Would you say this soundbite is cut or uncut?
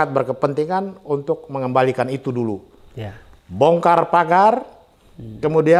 uncut